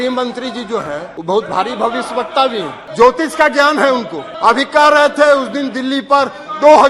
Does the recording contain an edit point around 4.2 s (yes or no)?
yes